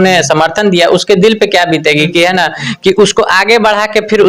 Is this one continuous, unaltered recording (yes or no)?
yes